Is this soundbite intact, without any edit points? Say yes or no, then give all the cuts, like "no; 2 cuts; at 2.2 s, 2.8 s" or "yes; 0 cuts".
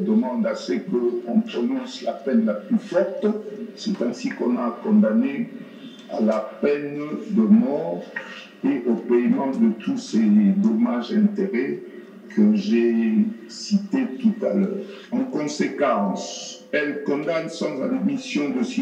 no; 1 cut; at 14.9 s